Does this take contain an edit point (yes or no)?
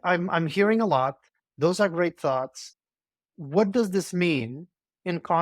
no